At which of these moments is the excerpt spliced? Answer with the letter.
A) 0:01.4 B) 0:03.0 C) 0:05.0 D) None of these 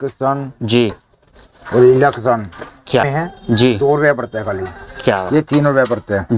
B